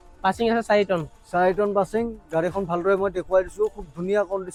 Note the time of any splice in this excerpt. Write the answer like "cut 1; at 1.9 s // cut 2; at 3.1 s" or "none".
none